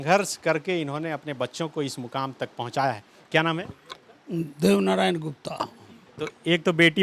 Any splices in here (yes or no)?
no